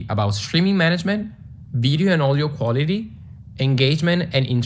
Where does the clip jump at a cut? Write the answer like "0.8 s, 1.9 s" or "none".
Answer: 1.9 s